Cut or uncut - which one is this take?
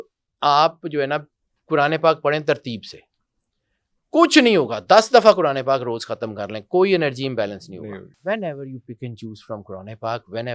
cut